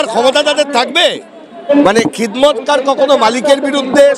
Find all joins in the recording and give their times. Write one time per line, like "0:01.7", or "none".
0:01.7